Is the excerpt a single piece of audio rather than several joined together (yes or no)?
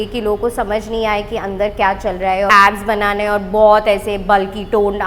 no